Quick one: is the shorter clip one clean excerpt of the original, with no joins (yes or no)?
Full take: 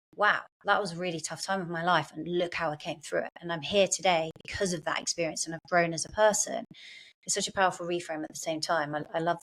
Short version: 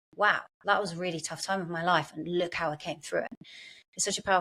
no